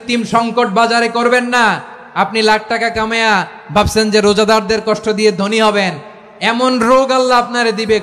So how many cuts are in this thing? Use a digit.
0